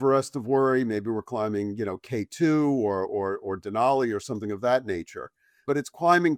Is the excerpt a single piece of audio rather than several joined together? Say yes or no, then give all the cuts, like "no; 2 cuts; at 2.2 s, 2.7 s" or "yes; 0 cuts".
yes; 0 cuts